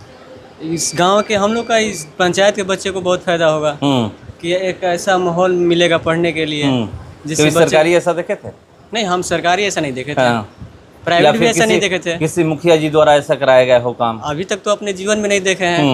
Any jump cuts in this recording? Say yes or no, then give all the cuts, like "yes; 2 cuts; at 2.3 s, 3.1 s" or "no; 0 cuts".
no; 0 cuts